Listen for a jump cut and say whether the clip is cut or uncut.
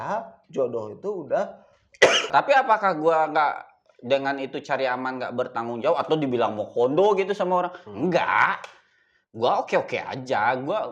cut